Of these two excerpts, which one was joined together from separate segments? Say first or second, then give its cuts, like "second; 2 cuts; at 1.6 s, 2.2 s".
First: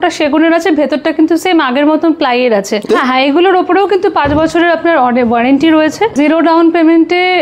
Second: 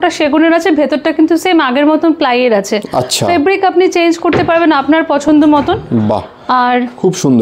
first; 2 cuts; at 2.9 s, 6.1 s